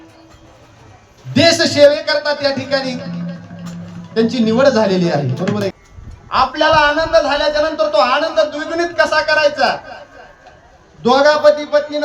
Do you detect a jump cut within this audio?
yes; 1 cut; at 5.7 s

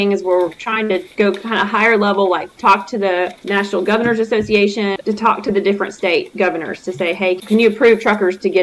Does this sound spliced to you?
no; 0 cuts

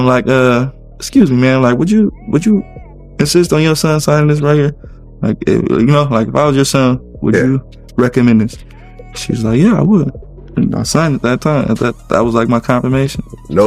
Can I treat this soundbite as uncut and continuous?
yes; 0 cuts

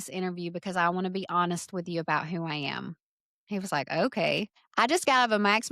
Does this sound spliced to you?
yes; 1 cut; at 4.6 s

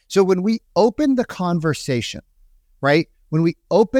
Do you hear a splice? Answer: no; 0 cuts

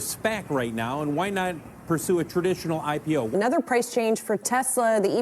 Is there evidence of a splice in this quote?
yes; 1 cut; at 3.3 s

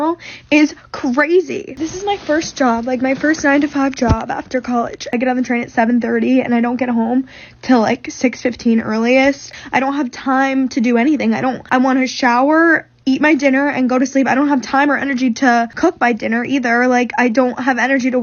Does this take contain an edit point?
yes; 5 cuts; at 1.8 s, 5.1 s, 9.5 s, 11.6 s, 15.7 s

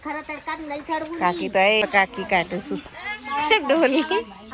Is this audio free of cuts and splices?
no; 1 cut; at 1.8 s

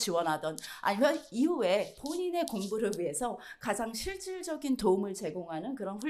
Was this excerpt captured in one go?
yes; 0 cuts

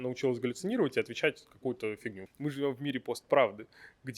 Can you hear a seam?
yes; 1 cut; at 2.2 s

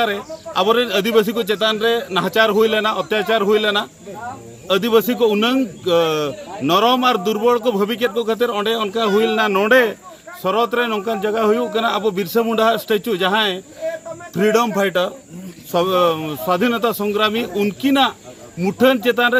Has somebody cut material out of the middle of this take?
no; 0 cuts

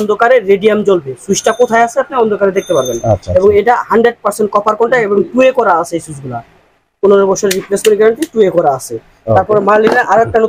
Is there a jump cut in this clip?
no; 0 cuts

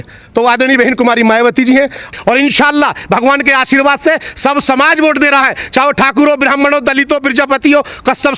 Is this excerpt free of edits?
no; 1 cut; at 2.0 s

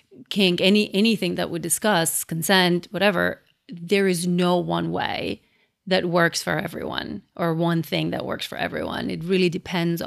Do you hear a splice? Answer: no; 0 cuts

